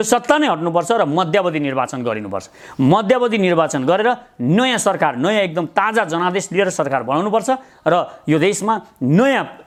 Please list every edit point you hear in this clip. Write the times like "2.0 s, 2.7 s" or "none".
none